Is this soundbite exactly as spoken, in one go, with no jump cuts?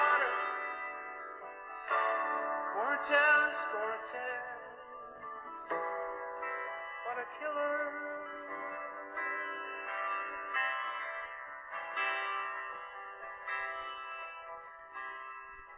yes; 0 cuts

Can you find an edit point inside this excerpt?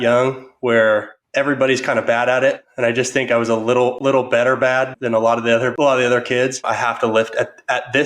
yes; 4 cuts; at 1.2 s, 2.7 s, 5.7 s, 6.6 s

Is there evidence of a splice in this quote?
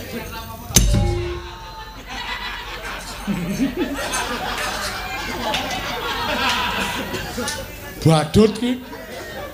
no; 0 cuts

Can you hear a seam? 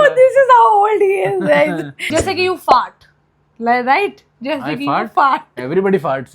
yes; 1 cut; at 1.9 s

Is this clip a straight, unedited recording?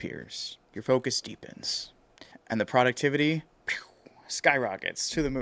yes; 0 cuts

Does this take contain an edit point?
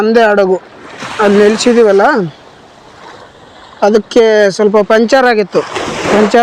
no; 0 cuts

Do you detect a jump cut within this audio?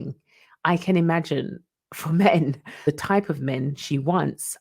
yes; 1 cut; at 2.9 s

